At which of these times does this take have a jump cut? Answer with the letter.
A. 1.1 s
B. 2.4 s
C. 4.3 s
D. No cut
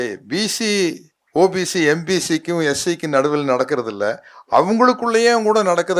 D